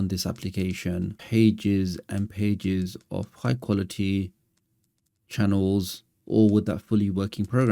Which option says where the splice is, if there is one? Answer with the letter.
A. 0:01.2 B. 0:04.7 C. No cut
A